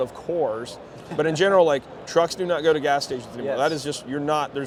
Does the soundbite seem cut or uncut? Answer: uncut